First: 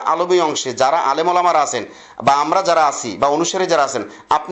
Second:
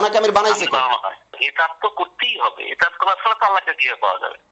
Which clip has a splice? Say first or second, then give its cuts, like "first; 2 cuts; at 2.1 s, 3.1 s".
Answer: second; 1 cut; at 1.3 s